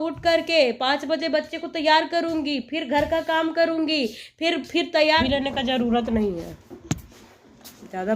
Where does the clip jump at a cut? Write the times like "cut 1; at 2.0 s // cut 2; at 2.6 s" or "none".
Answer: cut 1; at 5.2 s